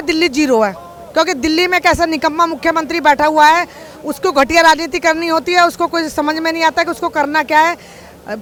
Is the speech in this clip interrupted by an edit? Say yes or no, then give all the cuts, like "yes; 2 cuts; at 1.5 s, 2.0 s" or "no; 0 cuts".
no; 0 cuts